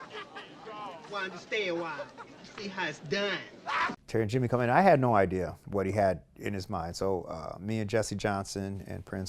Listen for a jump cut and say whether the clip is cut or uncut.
cut